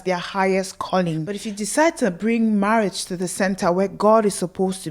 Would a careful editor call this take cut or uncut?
cut